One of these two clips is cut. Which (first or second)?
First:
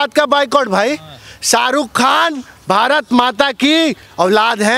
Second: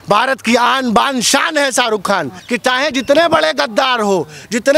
second